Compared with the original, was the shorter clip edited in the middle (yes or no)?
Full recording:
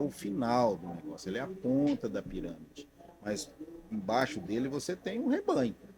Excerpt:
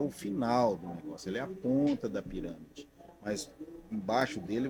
no